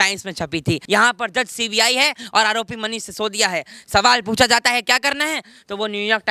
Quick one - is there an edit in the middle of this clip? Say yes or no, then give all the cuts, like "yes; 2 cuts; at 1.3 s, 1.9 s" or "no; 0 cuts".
no; 0 cuts